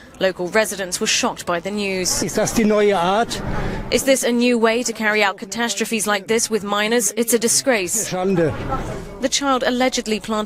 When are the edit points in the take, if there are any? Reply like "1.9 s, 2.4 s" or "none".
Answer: none